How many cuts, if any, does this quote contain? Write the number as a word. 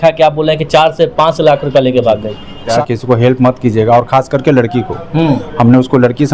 one